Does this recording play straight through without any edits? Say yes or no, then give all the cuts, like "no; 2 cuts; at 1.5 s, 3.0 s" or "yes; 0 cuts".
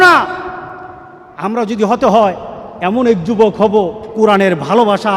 no; 1 cut; at 4.0 s